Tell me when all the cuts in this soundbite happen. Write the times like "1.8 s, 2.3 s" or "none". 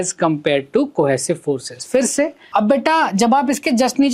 2.4 s